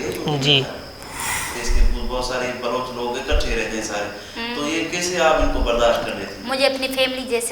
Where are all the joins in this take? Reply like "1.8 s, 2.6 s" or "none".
1.5 s